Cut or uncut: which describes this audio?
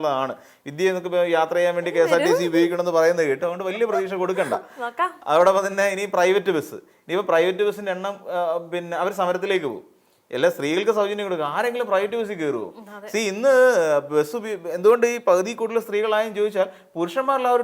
uncut